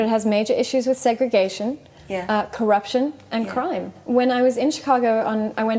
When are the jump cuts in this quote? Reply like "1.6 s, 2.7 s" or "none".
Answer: none

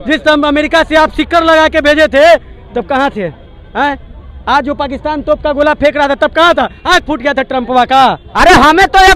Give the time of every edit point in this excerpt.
8.3 s

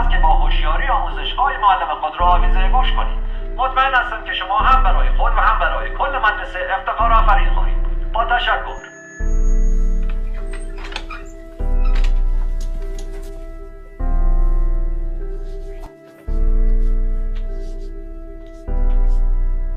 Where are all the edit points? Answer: 18.3 s

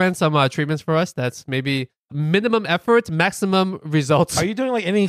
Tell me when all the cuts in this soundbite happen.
2.1 s

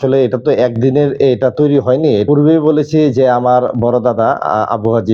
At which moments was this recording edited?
2.2 s

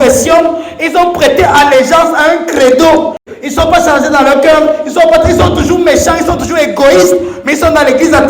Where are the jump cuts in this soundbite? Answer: 3.3 s

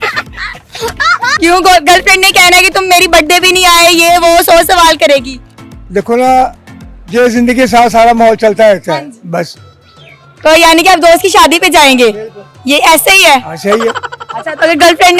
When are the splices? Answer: none

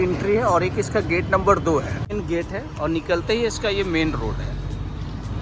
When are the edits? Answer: 2.1 s

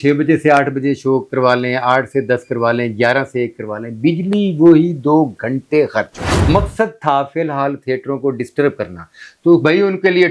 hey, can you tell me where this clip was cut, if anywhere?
6.4 s

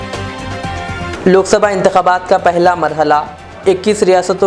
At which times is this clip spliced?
1.1 s

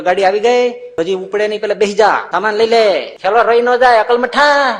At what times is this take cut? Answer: 0.8 s, 2.3 s, 3.1 s

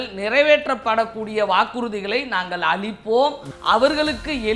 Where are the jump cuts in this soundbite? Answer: 3.5 s

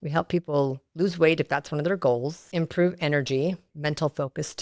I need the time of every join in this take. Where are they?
2.5 s, 3.7 s

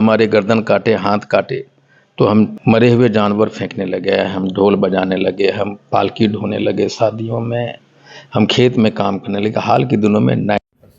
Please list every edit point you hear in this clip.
2.6 s

